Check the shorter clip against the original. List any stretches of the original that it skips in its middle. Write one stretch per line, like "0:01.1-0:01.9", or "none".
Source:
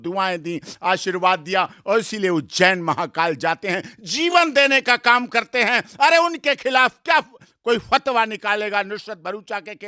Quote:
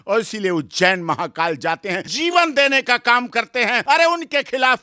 0:03.9-0:04.1
0:05.8-0:05.9